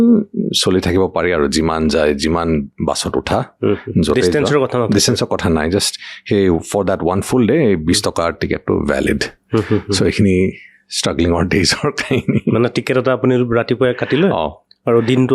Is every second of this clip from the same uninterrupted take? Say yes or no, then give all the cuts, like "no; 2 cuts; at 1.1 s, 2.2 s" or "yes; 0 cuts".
yes; 0 cuts